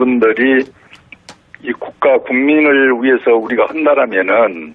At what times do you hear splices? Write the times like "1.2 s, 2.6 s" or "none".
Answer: 3.0 s